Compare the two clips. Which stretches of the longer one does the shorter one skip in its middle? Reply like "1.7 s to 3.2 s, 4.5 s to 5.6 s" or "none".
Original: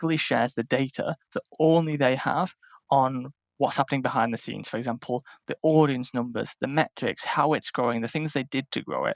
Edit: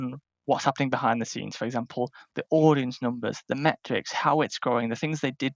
none